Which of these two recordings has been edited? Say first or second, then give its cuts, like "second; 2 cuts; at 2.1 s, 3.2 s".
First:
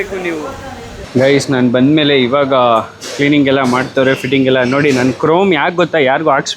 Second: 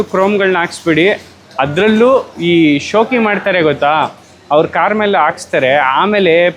first; 1 cut; at 1.0 s